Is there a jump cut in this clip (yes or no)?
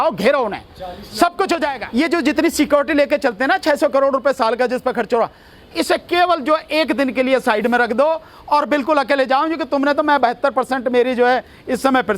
yes